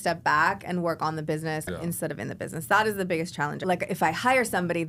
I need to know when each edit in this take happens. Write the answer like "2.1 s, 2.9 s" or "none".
1.7 s, 3.6 s